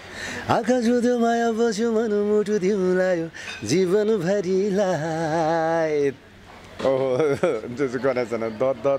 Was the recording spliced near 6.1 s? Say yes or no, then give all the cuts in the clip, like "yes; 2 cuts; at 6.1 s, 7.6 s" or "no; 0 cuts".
yes; 1 cut; at 6.1 s